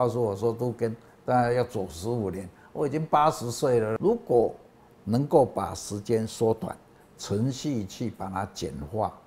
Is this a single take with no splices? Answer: no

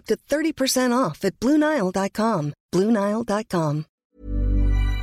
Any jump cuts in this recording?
yes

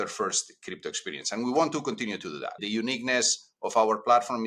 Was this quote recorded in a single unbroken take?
no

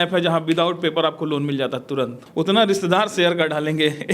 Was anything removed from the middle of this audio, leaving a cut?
yes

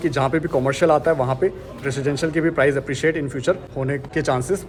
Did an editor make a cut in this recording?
no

